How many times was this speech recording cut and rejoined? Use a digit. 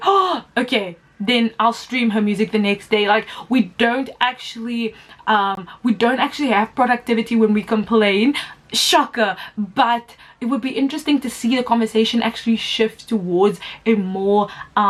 0